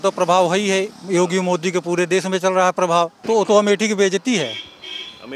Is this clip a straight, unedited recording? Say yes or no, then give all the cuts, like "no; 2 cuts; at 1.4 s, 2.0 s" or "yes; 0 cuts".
no; 1 cut; at 3.2 s